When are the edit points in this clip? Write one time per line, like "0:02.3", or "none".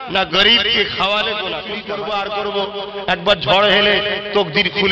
0:01.8